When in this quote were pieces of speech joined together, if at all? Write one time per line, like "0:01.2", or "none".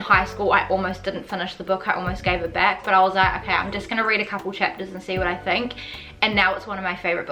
none